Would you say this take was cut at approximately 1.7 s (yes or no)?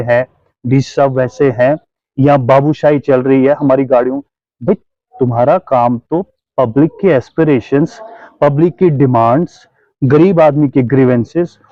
no